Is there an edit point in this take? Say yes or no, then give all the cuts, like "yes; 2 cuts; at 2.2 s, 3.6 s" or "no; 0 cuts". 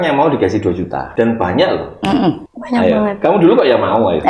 yes; 2 cuts; at 1.0 s, 2.5 s